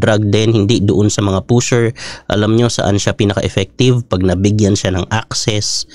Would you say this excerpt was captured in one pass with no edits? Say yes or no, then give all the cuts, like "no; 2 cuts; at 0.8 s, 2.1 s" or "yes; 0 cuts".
yes; 0 cuts